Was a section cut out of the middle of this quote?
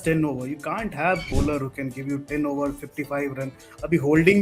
yes; 1 cut; at 1.3 s

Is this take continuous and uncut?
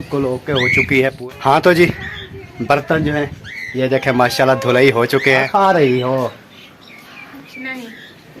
no; 2 cuts; at 1.2 s, 5.5 s

